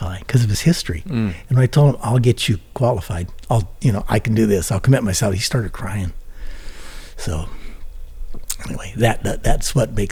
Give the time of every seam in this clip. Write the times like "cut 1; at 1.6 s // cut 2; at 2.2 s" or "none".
none